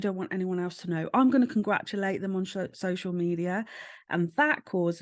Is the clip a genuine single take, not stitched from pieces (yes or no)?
yes